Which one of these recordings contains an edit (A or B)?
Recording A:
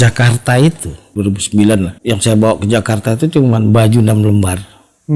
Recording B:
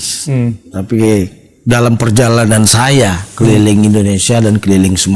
A